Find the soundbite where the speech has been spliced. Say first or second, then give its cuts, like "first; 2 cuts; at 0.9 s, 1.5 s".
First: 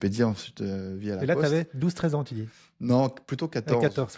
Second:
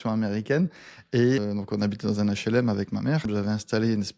second; 2 cuts; at 1.4 s, 3.3 s